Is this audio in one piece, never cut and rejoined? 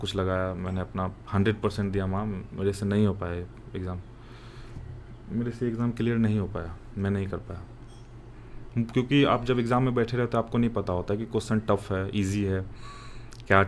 yes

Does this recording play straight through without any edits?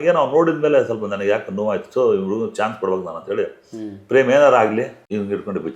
yes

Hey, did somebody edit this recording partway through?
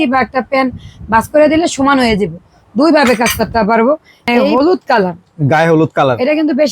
yes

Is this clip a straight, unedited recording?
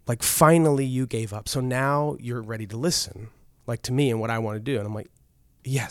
yes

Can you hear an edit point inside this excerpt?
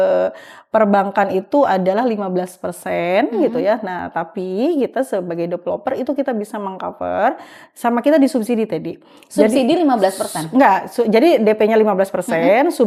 no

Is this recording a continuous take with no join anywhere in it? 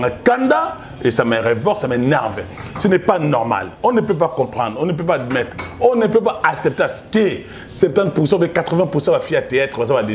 yes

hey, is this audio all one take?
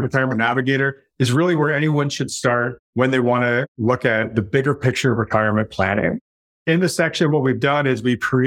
yes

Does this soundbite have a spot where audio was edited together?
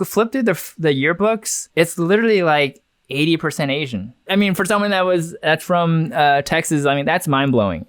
yes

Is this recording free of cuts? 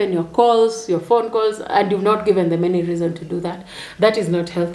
yes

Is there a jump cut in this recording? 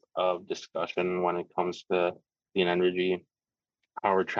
yes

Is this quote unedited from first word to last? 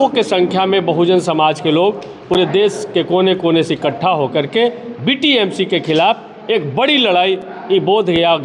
yes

